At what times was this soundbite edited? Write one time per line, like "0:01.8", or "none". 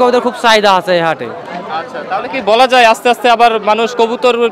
none